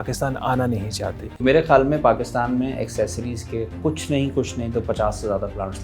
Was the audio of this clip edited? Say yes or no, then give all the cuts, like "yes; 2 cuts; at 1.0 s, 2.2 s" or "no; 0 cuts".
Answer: yes; 1 cut; at 1.4 s